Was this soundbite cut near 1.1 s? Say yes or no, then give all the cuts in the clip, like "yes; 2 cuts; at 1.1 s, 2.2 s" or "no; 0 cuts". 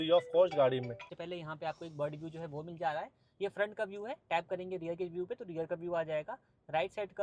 yes; 1 cut; at 1.1 s